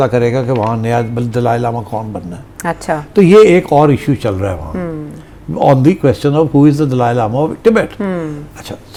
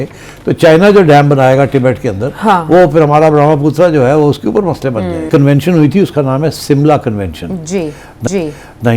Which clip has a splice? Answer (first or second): second